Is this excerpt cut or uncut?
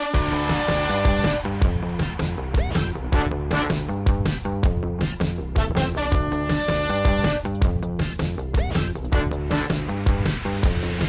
cut